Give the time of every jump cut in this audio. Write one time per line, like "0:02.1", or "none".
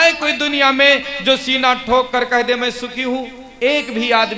none